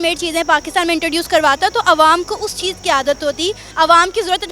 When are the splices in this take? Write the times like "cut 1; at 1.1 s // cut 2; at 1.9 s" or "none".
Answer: cut 1; at 3.6 s